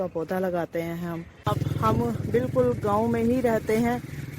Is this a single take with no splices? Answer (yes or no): no